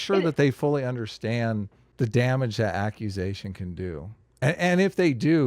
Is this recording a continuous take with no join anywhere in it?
no; 1 cut; at 1.8 s

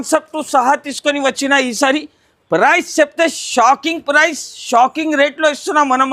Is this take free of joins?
yes; 0 cuts

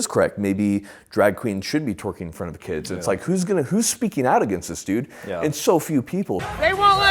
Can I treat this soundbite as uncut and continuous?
yes; 0 cuts

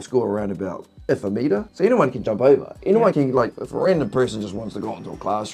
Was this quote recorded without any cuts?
yes; 0 cuts

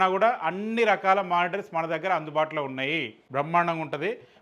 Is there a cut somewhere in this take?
yes; 1 cut; at 3.2 s

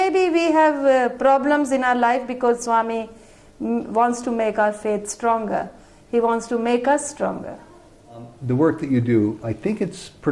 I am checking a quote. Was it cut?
yes; 1 cut; at 8.3 s

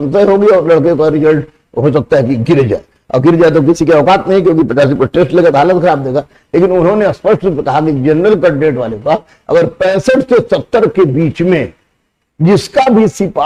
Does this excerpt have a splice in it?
no; 0 cuts

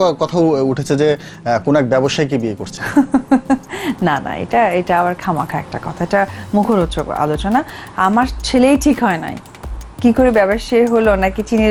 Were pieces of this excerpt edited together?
no; 0 cuts

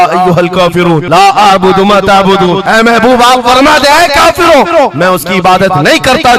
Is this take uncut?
yes; 0 cuts

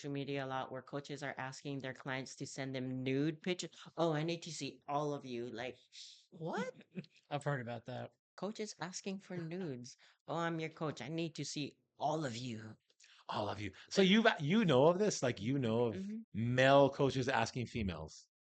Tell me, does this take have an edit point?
yes; 2 cuts; at 8.3 s, 16.2 s

